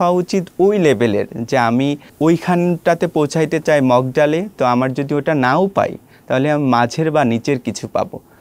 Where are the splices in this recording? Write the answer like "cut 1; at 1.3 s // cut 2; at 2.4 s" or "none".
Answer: cut 1; at 2.1 s